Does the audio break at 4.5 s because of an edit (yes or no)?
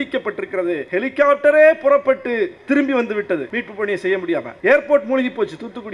yes